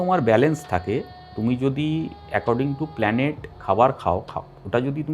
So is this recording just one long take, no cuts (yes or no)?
yes